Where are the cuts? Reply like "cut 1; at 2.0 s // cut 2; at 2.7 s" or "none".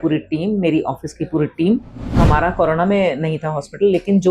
cut 1; at 2.2 s